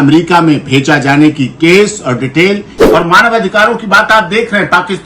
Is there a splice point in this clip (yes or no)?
yes